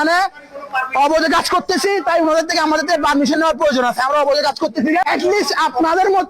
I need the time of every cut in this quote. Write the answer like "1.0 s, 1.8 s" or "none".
5.0 s

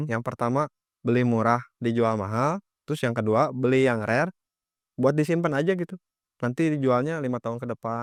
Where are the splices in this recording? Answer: none

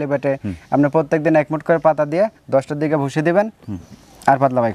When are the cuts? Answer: none

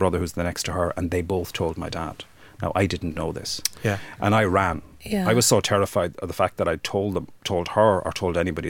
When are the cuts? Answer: none

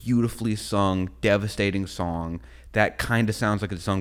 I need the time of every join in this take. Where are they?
none

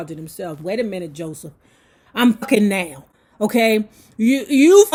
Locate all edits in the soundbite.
none

